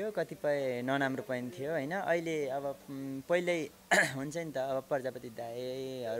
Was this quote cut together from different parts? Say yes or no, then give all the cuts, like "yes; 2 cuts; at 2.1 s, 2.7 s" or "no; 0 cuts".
no; 0 cuts